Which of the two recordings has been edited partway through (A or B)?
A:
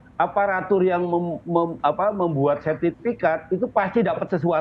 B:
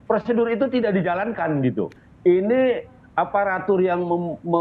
B